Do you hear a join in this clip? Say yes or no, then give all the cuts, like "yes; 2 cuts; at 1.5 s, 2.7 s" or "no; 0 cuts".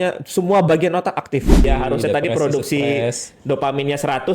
yes; 1 cut; at 1.6 s